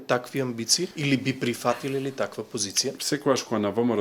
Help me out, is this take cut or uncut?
cut